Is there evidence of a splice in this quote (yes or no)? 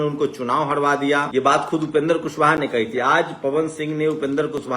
yes